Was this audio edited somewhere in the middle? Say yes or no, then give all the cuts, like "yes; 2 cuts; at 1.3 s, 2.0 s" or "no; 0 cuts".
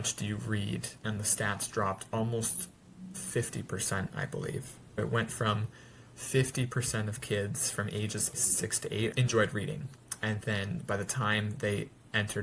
yes; 3 cuts; at 0.9 s, 5.0 s, 8.5 s